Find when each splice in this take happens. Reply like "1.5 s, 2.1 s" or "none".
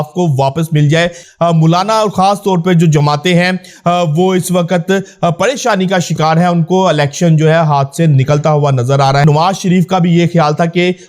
1.2 s, 9.2 s